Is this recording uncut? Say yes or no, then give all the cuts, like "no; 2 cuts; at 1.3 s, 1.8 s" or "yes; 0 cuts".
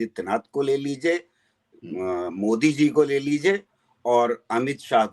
yes; 0 cuts